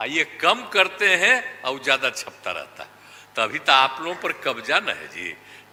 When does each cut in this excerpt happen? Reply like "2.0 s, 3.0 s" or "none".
none